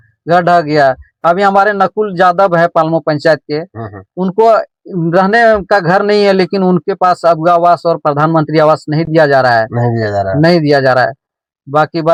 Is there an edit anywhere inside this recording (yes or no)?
no